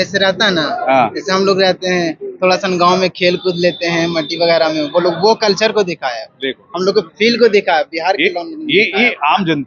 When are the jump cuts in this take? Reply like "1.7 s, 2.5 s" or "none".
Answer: none